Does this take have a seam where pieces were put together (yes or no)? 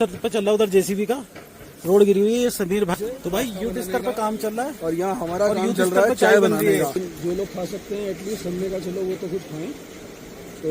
yes